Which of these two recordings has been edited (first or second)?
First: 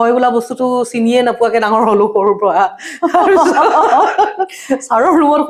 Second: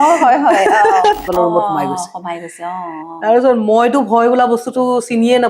second